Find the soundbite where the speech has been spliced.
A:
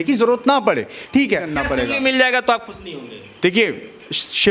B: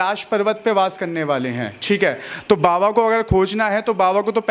A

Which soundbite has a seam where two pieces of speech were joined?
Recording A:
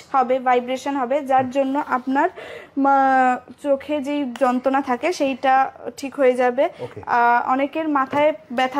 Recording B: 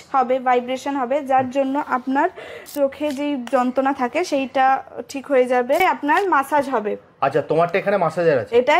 B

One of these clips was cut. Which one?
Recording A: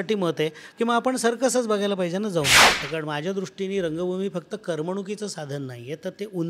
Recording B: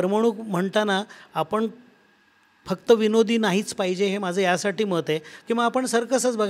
A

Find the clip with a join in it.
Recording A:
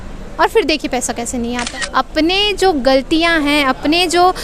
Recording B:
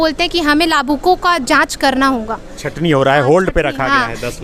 A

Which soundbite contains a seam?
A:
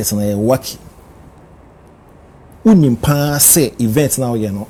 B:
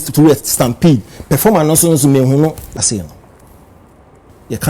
B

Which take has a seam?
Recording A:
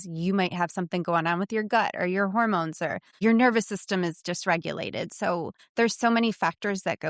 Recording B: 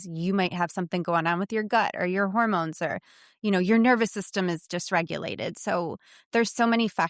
A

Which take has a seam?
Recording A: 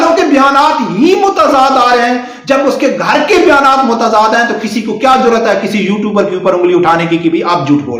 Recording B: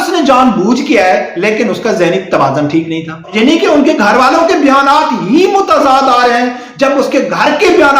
B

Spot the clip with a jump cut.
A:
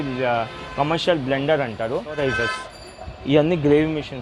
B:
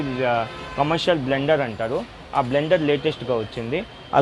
A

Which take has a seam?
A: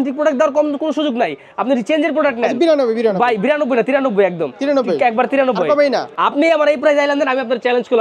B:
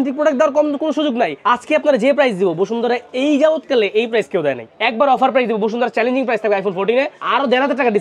B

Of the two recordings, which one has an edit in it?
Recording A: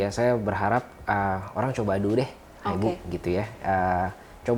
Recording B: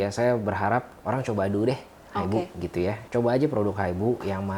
B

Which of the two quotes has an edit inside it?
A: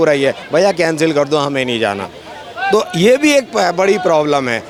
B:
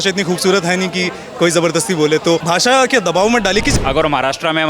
B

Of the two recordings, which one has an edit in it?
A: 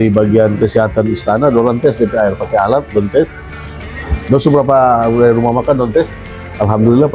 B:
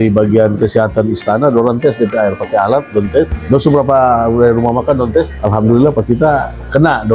B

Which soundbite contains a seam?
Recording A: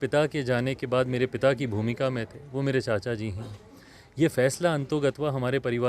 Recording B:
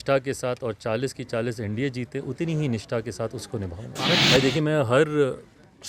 B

